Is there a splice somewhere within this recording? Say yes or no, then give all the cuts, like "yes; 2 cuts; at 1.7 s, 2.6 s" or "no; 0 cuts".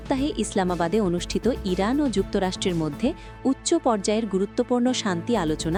no; 0 cuts